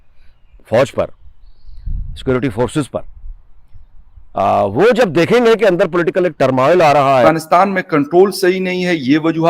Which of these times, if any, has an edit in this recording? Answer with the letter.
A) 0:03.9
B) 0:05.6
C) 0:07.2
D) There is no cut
C